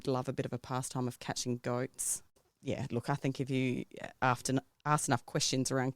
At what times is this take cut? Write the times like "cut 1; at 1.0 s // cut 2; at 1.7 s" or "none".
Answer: cut 1; at 2.5 s